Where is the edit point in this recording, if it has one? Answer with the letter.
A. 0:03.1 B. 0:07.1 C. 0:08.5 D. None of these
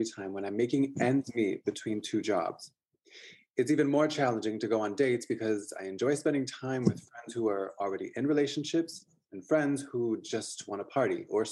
D